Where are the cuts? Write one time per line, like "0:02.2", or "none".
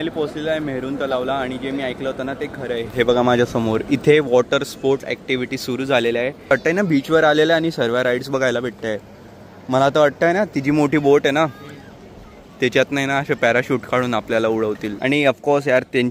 0:06.4
0:14.9